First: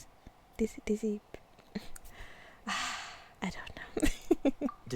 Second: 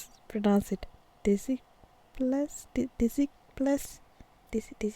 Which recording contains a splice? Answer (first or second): first